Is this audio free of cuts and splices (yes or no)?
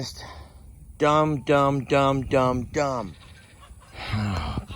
no